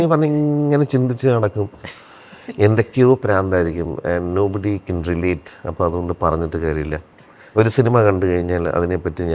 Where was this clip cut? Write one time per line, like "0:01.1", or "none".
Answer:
none